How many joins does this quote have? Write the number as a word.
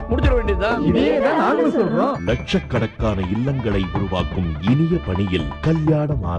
zero